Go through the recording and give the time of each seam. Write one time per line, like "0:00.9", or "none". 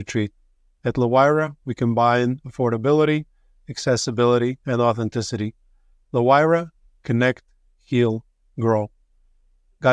none